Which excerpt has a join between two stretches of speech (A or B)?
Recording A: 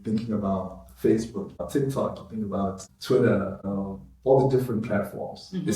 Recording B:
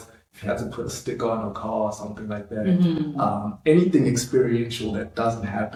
A